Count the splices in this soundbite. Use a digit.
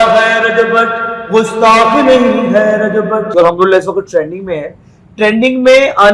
1